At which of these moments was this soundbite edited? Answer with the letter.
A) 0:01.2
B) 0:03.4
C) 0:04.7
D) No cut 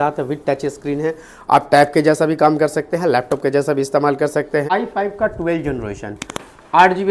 C